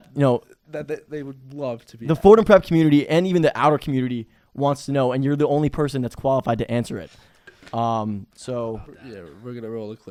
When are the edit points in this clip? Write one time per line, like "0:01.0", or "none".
none